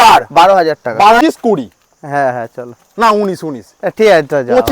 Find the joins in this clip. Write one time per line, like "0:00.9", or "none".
0:01.2